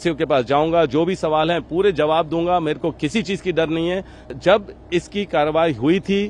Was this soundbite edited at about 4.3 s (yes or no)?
yes